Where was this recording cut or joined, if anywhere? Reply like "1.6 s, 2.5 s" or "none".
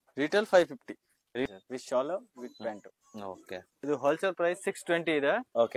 1.5 s, 3.7 s